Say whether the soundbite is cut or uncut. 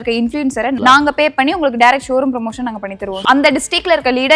cut